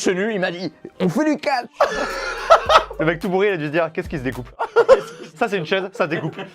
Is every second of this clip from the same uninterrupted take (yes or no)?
no